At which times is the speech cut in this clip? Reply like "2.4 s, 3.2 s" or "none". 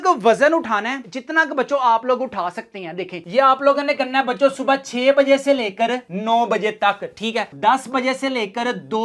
3.2 s, 7.5 s